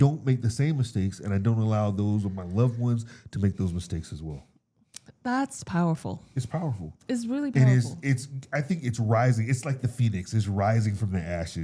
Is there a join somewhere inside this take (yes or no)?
no